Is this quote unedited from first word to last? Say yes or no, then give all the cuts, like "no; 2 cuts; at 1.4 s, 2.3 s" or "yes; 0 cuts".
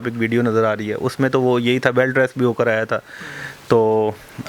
yes; 0 cuts